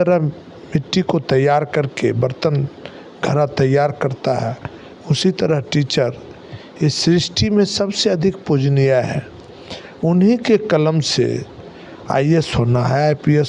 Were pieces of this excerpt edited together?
no; 0 cuts

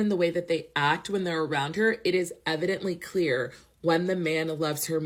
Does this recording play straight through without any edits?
yes; 0 cuts

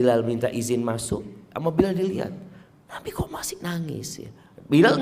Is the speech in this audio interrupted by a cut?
yes; 1 cut; at 1.4 s

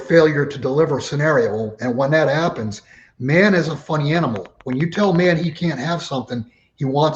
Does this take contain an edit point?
no; 0 cuts

